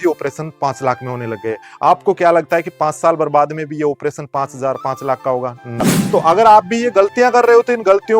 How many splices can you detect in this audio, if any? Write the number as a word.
one